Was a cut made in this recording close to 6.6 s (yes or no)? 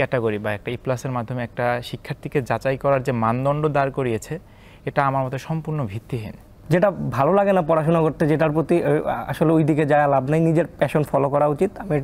yes